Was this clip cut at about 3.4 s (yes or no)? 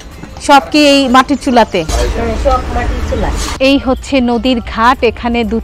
yes